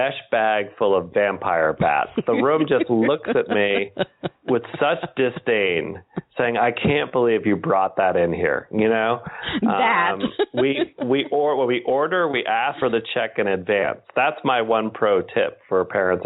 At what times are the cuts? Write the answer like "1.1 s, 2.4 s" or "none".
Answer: 4.3 s, 12.8 s